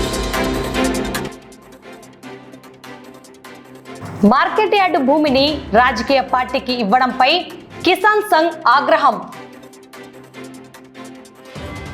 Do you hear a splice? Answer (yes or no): yes